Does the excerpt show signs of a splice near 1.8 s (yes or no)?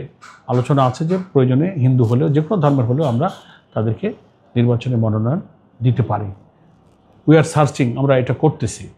no